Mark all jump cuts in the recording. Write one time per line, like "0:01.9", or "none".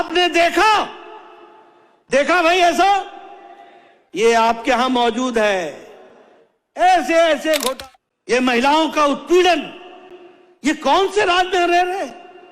0:07.7